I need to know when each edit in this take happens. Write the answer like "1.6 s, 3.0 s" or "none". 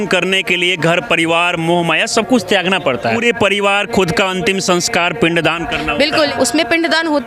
3.2 s, 6.3 s

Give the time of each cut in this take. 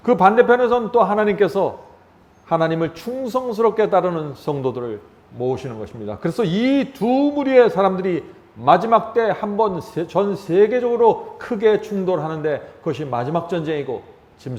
none

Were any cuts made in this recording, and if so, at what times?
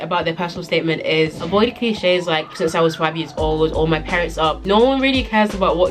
1.4 s

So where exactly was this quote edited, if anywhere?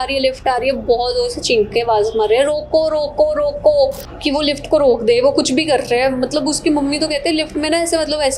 4.1 s

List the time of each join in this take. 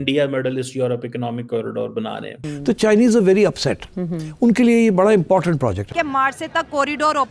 5.9 s

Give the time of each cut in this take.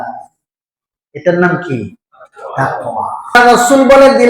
3.4 s

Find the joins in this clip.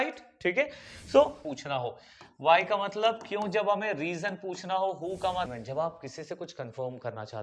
1.4 s, 5.5 s

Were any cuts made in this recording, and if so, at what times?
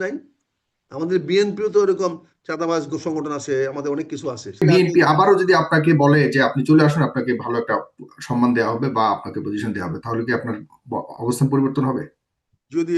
4.6 s

